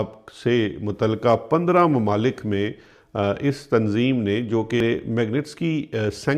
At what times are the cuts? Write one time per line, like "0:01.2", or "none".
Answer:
0:04.8